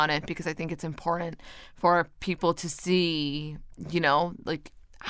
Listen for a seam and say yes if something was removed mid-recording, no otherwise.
no